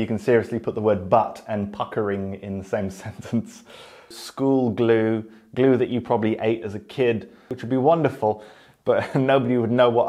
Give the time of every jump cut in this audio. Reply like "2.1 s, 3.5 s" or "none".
4.2 s, 7.5 s

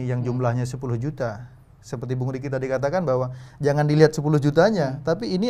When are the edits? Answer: none

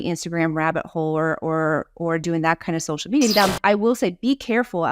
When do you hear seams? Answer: 3.3 s

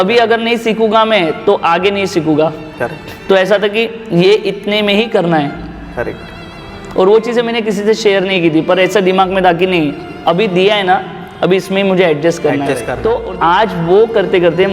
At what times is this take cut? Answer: 12.9 s

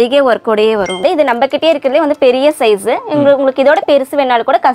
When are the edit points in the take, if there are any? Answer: 1.0 s

